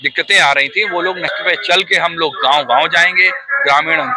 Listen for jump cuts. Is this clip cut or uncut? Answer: cut